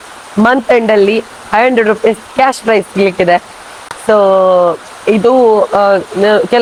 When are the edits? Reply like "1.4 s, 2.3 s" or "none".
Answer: none